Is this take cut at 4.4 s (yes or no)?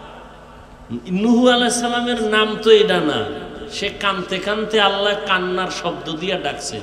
no